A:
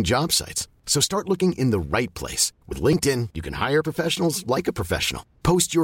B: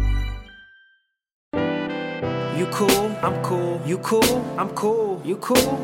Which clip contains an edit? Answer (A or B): B